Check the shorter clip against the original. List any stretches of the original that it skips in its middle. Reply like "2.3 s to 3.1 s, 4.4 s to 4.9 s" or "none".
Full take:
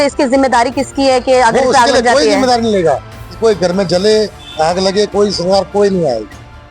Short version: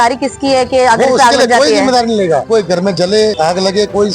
3.0 s to 3.4 s, 4.3 s to 4.5 s

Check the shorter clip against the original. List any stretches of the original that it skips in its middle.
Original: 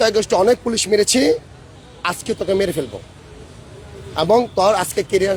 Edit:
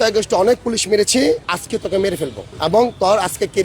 1.5 s to 2.1 s, 3.0 s to 4.0 s

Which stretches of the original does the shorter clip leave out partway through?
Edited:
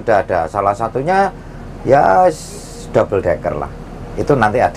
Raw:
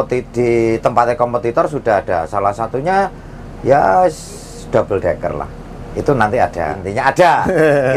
none

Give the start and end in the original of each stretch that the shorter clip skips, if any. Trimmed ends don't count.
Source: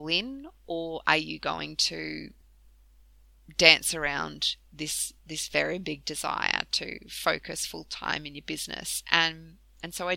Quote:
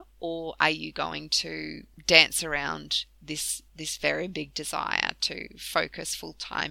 2.3 s to 3.4 s

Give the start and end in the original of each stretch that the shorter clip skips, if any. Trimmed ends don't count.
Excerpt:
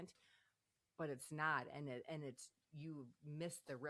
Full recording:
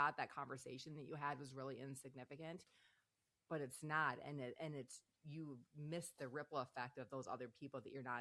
none

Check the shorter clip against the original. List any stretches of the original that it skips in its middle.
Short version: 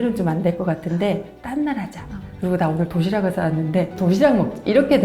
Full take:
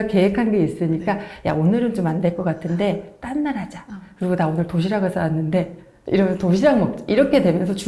5.8 s to 6.4 s

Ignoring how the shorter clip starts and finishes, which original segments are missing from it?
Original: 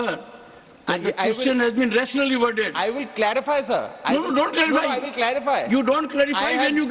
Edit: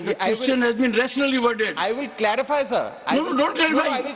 none

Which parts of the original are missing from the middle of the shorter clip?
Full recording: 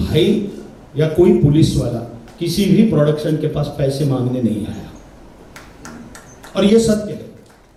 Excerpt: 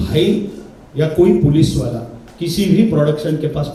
none

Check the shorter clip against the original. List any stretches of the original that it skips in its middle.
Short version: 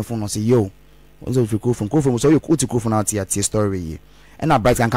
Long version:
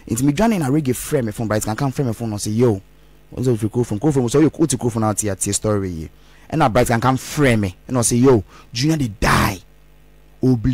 none

